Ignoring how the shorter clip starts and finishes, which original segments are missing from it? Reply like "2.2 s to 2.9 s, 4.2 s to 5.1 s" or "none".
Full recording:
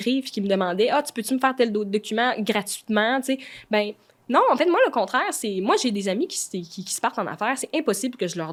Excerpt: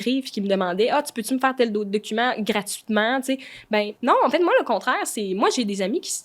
3.9 s to 4.2 s